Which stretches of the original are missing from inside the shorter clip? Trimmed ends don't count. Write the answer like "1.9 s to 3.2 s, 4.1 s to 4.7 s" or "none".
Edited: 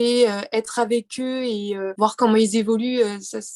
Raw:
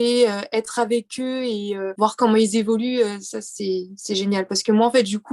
none